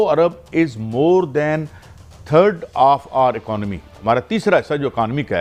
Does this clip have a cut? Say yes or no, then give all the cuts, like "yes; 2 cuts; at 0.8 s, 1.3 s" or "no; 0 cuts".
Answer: no; 0 cuts